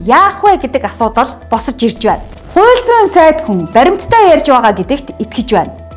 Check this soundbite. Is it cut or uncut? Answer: cut